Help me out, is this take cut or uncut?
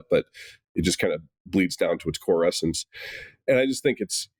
uncut